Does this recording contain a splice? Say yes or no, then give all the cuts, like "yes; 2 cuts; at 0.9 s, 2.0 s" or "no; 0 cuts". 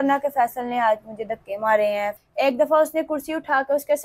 yes; 1 cut; at 2.1 s